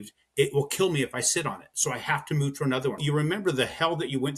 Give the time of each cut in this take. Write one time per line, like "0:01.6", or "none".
0:03.0